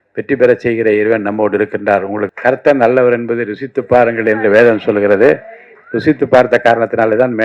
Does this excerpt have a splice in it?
yes; 1 cut; at 2.2 s

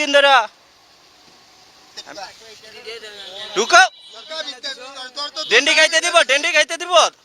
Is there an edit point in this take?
yes; 1 cut; at 2.1 s

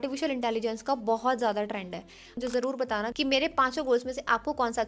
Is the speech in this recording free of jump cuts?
no; 1 cut; at 2.3 s

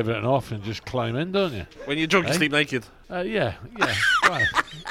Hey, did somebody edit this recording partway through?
yes; 2 cuts; at 1.8 s, 3.0 s

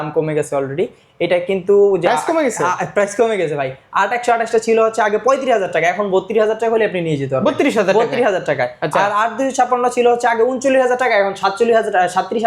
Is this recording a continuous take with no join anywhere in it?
yes; 0 cuts

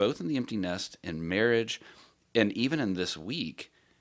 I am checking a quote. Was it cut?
no; 0 cuts

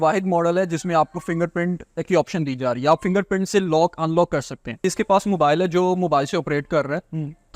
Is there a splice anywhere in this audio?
yes; 1 cut; at 4.8 s

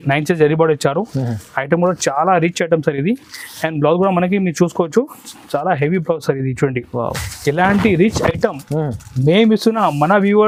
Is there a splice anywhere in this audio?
no; 0 cuts

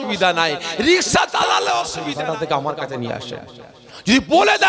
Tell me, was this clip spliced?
yes; 1 cut; at 2.0 s

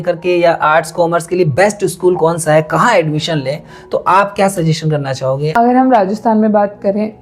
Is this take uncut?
no; 1 cut; at 5.5 s

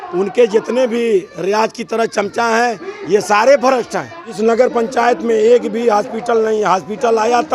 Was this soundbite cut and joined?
yes; 1 cut; at 4.2 s

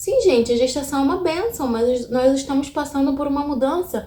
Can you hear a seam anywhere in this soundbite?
no; 0 cuts

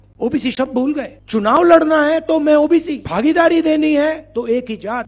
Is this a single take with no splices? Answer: no; 3 cuts; at 1.2 s, 3.0 s, 4.2 s

